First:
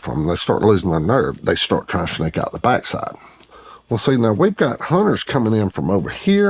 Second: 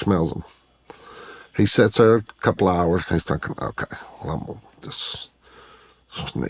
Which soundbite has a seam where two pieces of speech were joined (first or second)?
first